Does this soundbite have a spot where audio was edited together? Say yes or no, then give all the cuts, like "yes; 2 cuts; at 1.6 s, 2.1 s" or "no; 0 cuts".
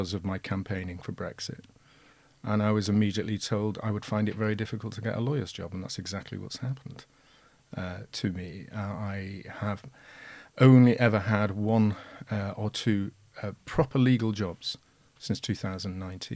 no; 0 cuts